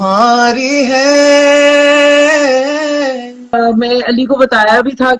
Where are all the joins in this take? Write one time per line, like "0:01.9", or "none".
0:03.5